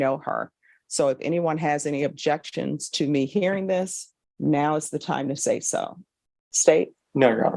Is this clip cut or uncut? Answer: uncut